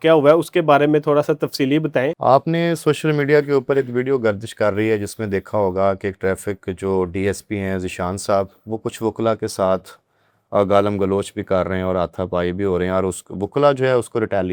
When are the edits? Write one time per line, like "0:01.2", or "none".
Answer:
0:02.2